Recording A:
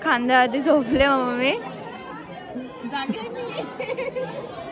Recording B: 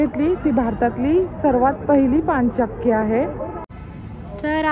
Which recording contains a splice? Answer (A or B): B